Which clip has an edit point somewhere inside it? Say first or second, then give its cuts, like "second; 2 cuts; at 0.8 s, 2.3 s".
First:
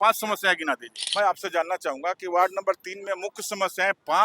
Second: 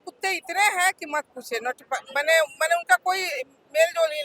first; 1 cut; at 1.0 s